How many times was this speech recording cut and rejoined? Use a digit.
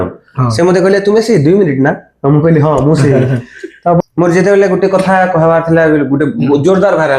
1